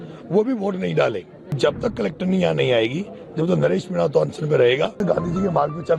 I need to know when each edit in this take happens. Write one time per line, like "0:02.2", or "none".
0:01.5
0:05.0